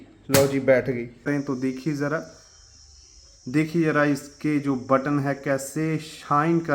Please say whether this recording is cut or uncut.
cut